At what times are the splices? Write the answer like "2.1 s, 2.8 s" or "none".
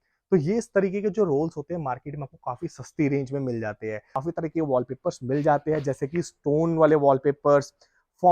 4.2 s